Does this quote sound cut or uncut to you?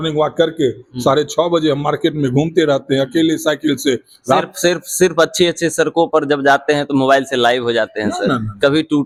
uncut